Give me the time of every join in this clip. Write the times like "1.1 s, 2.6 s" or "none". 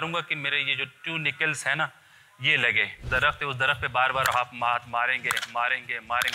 3.0 s